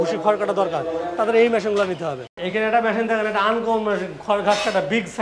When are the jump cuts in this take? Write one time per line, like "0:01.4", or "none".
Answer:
0:02.4